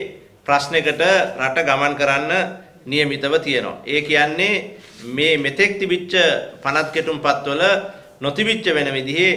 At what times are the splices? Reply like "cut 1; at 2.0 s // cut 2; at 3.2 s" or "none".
none